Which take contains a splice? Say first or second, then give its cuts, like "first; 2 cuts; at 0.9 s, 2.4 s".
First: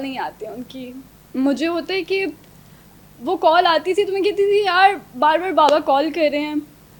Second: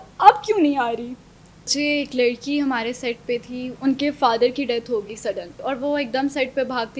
second; 3 cuts; at 1.7 s, 3.7 s, 5.5 s